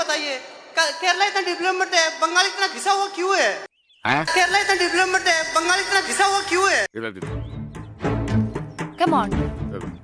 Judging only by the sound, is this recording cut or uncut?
cut